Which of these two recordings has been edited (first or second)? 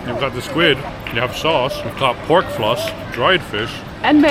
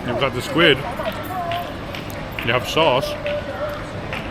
first